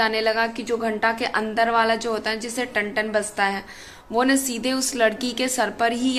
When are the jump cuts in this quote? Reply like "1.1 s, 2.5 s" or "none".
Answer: none